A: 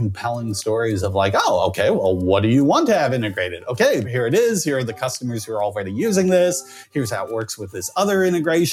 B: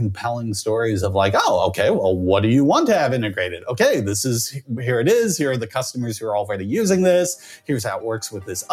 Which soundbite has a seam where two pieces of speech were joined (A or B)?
A